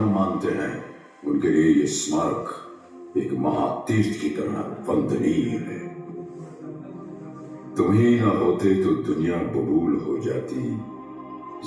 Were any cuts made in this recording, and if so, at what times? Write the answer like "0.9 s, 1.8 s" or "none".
none

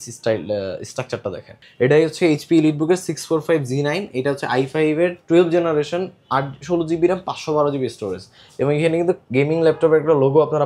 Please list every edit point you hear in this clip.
1.6 s

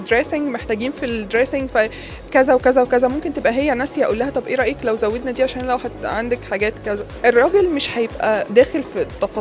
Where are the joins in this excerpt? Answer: 7.1 s, 8.5 s

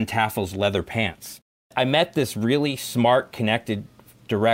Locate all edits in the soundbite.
1.7 s

